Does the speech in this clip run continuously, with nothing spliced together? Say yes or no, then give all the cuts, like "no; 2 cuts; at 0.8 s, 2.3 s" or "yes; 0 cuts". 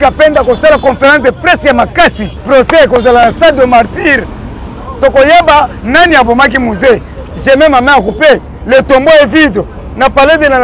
no; 1 cut; at 2.3 s